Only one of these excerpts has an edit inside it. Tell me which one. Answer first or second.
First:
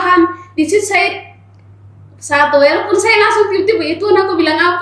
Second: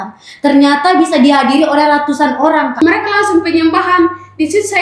second